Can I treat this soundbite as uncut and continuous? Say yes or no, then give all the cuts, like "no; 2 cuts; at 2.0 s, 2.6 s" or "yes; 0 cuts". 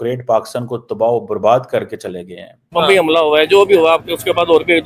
no; 1 cut; at 2.6 s